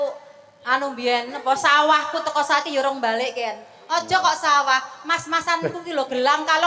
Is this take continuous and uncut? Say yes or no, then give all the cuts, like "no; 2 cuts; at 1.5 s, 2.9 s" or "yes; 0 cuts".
yes; 0 cuts